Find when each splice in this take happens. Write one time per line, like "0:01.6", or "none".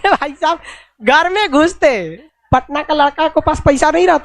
0:02.1